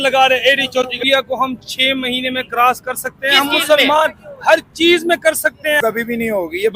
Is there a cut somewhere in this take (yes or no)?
yes